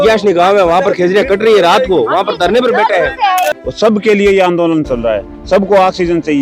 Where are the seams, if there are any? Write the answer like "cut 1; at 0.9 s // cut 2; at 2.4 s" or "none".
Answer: cut 1; at 3.6 s